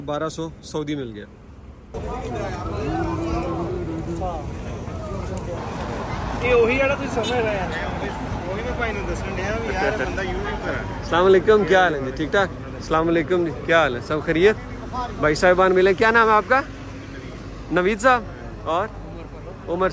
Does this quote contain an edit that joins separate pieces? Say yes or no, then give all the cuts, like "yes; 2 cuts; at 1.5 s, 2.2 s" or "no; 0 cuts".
no; 0 cuts